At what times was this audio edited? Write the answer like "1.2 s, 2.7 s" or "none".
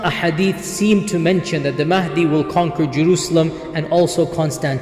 none